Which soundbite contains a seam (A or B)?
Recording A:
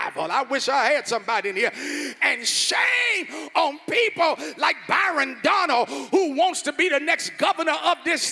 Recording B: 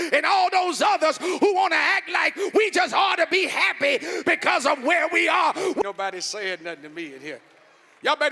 B